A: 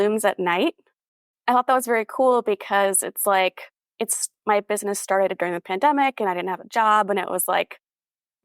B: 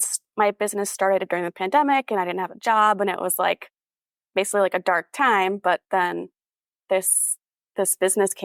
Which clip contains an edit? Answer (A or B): A